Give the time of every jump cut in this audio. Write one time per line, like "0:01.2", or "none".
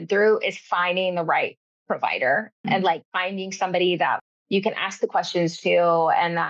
0:02.5
0:04.2